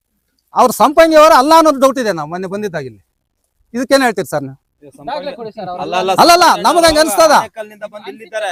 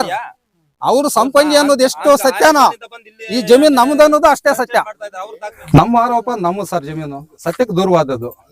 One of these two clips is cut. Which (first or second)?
second